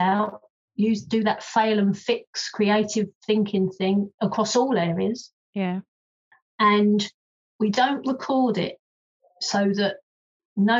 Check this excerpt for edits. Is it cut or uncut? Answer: uncut